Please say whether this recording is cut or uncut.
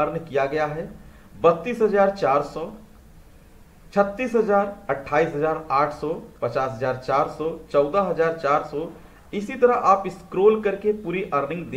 uncut